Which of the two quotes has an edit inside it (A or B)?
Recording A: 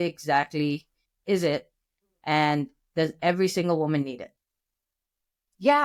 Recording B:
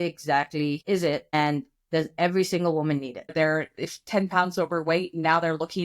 B